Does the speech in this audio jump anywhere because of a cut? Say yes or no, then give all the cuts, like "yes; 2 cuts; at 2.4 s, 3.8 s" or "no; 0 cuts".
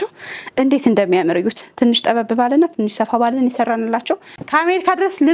yes; 1 cut; at 4.3 s